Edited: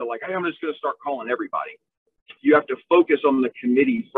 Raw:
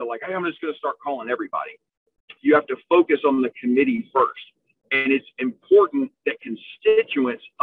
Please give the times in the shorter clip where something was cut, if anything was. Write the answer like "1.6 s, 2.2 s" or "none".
none